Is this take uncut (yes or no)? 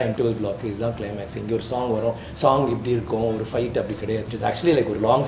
no